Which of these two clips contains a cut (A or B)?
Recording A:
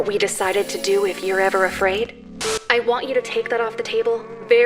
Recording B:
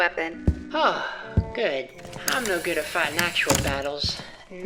A